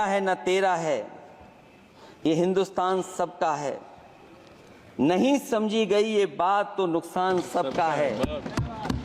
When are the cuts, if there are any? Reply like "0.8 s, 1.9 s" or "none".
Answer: none